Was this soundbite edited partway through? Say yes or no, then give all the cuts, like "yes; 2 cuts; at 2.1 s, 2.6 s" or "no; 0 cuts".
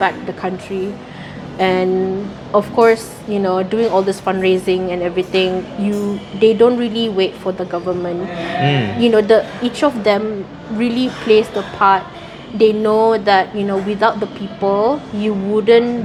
no; 0 cuts